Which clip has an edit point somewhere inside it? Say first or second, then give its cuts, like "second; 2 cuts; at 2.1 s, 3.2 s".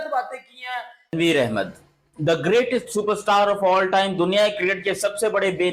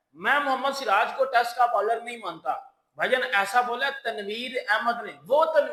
first; 1 cut; at 1.1 s